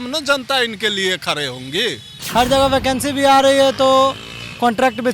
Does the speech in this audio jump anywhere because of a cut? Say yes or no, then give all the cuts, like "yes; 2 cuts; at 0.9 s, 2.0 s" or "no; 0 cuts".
yes; 1 cut; at 2.2 s